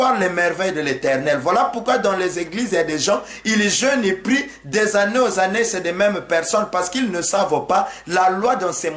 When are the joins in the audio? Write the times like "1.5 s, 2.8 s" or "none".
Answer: none